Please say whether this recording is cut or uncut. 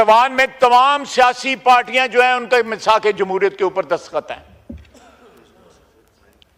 uncut